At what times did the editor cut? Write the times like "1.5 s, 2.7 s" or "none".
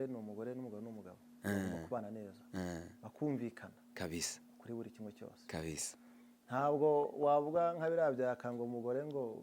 none